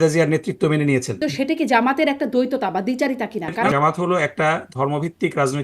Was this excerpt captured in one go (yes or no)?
no